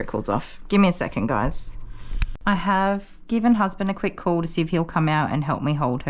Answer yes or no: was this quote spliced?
yes